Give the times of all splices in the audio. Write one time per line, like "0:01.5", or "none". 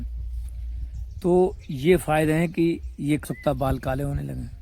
0:03.2